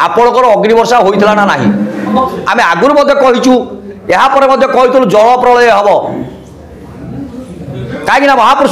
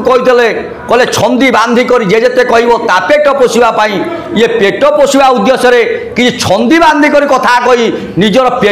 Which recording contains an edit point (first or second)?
first